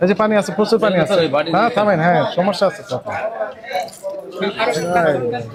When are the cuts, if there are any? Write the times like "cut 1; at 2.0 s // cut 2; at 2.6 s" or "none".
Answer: none